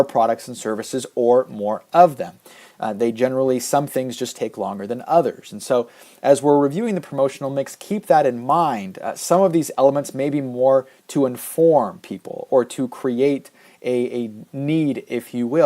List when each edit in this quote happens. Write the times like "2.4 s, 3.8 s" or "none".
1.1 s